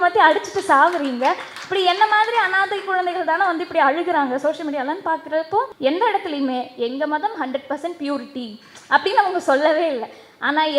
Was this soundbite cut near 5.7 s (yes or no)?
yes